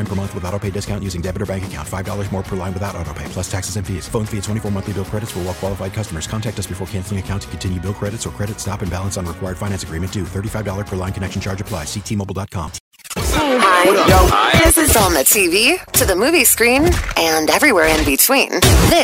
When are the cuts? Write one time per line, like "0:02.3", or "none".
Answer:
0:13.3